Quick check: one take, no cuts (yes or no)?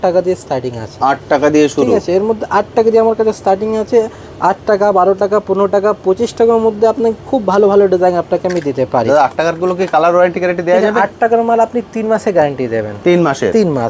yes